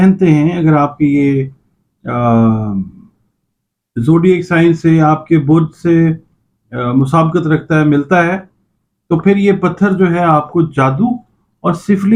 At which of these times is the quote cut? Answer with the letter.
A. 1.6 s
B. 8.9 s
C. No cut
C